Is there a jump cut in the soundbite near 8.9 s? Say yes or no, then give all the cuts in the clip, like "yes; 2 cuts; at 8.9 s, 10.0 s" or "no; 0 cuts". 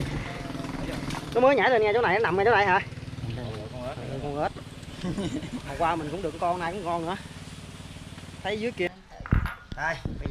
yes; 1 cut; at 8.9 s